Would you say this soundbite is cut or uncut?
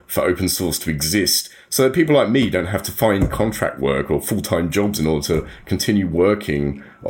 cut